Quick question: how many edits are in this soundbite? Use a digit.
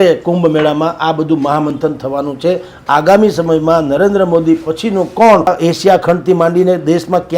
1